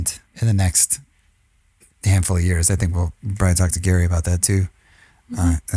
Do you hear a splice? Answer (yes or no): no